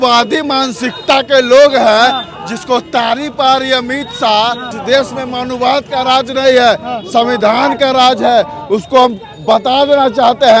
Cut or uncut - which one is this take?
uncut